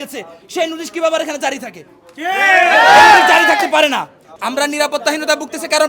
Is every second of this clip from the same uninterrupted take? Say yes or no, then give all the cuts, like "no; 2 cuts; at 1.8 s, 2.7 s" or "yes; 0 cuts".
no; 1 cut; at 4.3 s